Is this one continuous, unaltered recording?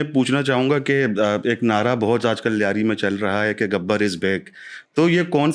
yes; 0 cuts

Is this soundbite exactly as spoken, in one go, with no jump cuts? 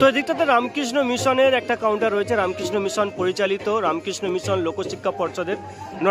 yes; 0 cuts

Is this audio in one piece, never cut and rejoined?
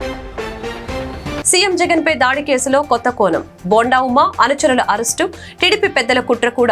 no; 1 cut; at 1.5 s

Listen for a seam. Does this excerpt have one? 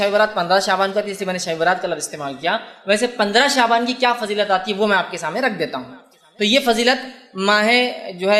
no; 0 cuts

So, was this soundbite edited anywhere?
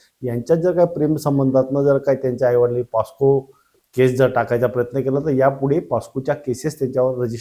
no; 0 cuts

